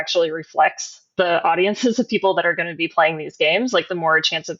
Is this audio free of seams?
yes; 0 cuts

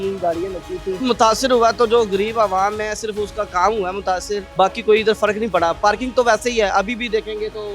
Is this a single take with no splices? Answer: no; 2 cuts; at 1.0 s, 4.5 s

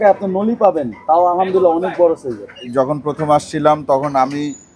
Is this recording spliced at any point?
yes; 1 cut; at 2.6 s

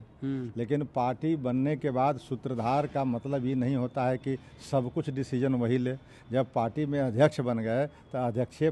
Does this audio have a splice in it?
no; 0 cuts

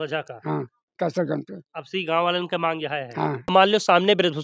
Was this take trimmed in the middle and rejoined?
yes; 1 cut; at 3.5 s

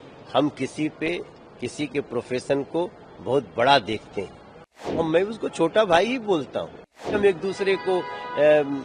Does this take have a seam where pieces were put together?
yes; 2 cuts; at 5.1 s, 7.1 s

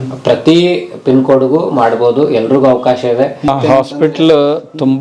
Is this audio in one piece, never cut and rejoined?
no; 1 cut; at 3.5 s

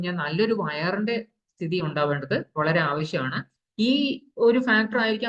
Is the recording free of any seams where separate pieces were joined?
yes; 0 cuts

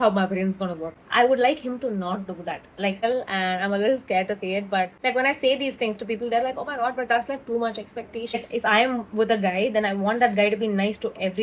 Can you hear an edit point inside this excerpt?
yes; 4 cuts; at 0.9 s, 3.0 s, 4.9 s, 8.3 s

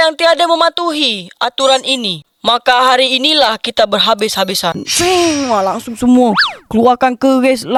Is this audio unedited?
yes; 0 cuts

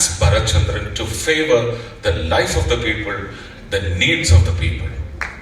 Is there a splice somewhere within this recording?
no; 0 cuts

